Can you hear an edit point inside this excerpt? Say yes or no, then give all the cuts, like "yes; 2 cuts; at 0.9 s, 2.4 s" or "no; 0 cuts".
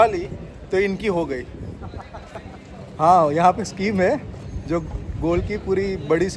no; 0 cuts